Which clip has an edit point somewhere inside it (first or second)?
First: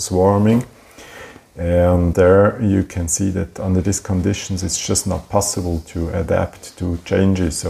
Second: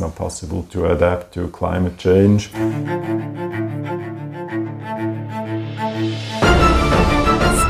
second